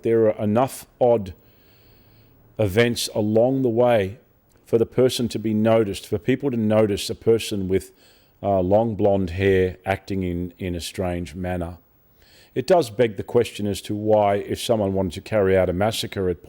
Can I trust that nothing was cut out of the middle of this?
yes; 0 cuts

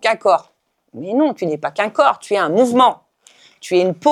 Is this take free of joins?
yes; 0 cuts

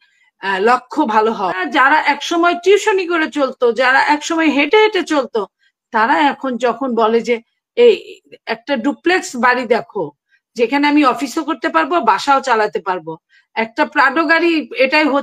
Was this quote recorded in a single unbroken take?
no; 1 cut; at 1.6 s

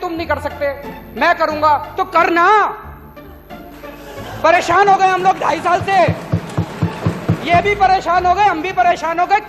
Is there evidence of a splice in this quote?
no; 0 cuts

